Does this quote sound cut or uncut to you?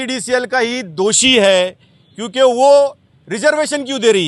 uncut